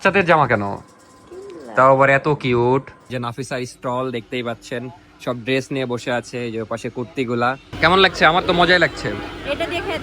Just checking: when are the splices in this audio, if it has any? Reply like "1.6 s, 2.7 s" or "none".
3.1 s, 7.7 s